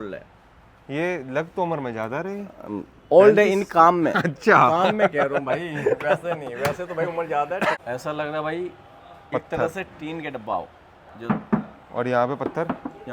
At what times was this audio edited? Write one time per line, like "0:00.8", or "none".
0:07.8